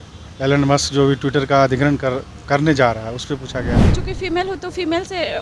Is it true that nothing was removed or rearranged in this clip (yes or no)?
no